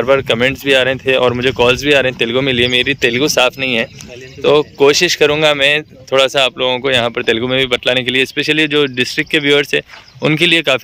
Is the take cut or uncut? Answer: uncut